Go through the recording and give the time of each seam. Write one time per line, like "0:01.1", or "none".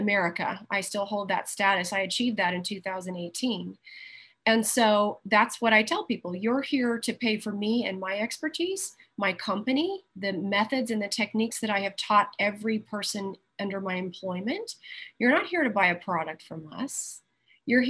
0:10.1